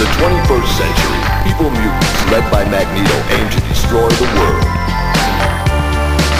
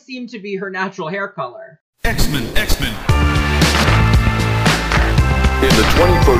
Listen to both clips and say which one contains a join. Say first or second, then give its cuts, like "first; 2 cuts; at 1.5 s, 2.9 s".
second; 1 cut; at 1.8 s